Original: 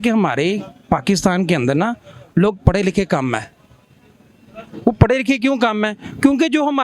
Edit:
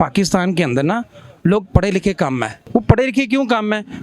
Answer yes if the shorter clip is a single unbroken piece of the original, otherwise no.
no